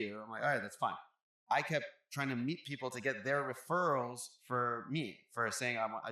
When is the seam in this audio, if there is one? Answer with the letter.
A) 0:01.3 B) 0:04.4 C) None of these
A